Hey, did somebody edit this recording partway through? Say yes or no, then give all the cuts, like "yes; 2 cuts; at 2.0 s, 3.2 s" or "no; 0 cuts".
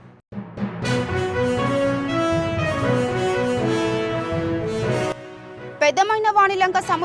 no; 0 cuts